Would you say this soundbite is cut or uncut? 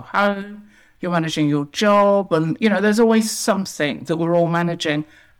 uncut